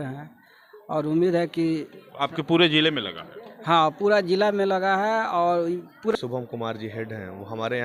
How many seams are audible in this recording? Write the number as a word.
one